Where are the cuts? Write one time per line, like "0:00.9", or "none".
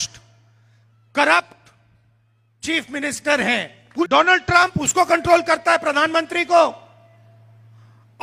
0:04.0